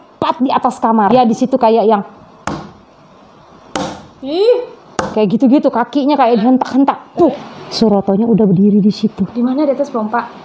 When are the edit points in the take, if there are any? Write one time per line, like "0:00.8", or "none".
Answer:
0:01.1
0:07.1